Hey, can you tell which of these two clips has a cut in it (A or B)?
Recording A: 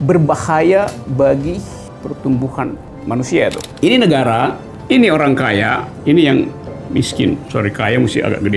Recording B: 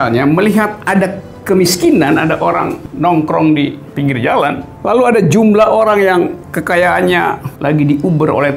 A